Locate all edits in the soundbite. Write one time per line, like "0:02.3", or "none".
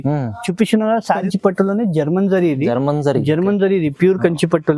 0:01.2